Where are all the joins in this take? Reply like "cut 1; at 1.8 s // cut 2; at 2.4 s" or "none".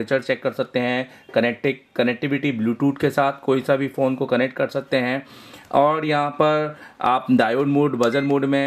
none